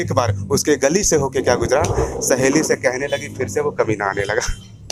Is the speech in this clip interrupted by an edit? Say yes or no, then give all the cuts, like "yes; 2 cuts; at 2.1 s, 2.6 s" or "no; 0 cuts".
no; 0 cuts